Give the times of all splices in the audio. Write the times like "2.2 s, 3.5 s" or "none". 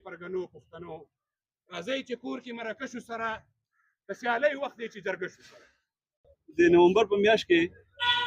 6.4 s